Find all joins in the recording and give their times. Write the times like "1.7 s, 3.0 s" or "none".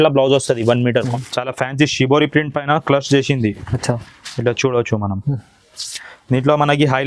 0.9 s